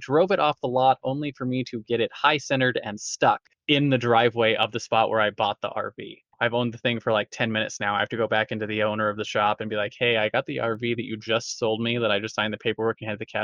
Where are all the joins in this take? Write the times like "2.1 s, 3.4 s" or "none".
3.5 s, 6.2 s